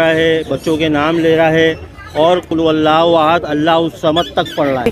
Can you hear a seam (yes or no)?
yes